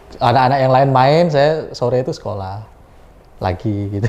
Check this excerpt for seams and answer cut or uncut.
uncut